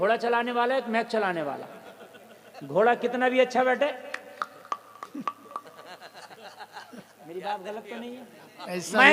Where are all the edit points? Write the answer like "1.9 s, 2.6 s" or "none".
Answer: none